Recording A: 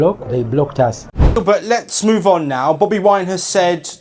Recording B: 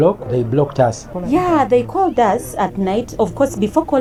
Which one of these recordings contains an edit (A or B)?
A